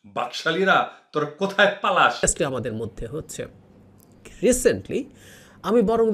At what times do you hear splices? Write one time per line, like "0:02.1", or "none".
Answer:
0:02.2